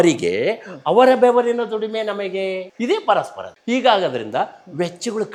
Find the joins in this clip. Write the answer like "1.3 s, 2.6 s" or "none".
none

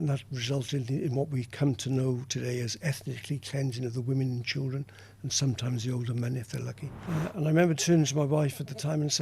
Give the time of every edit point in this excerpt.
6.9 s

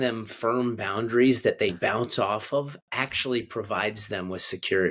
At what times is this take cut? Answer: none

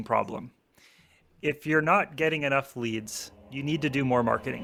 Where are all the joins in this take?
none

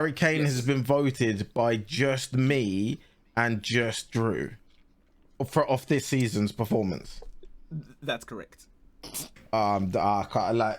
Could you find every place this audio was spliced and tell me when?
none

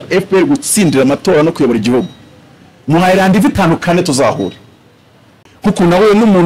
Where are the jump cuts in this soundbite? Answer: 5.4 s

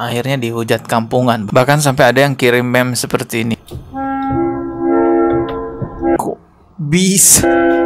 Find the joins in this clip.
3.6 s

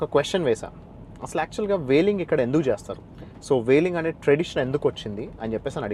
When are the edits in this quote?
none

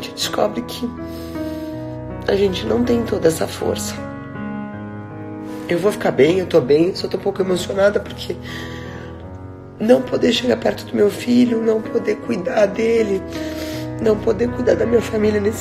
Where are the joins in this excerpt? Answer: 0.9 s, 2.2 s, 3.8 s, 5.7 s

